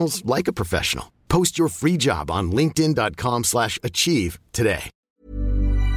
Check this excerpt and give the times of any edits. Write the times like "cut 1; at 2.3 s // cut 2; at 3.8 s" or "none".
cut 1; at 5.0 s